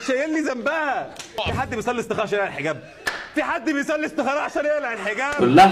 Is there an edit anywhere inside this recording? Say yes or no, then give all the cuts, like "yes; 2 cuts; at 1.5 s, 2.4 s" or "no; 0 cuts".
yes; 1 cut; at 1.4 s